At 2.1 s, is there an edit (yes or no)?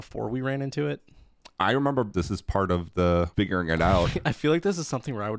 yes